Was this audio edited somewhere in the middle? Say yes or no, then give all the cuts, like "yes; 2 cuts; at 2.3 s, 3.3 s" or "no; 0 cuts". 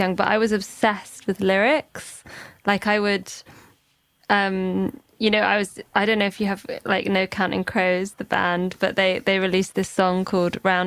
no; 0 cuts